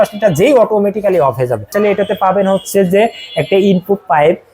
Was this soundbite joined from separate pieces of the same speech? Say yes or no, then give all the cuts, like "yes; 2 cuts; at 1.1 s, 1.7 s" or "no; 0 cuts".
yes; 1 cut; at 1.7 s